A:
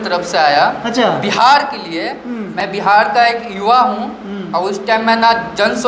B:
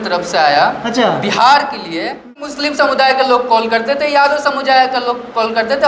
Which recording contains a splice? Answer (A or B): B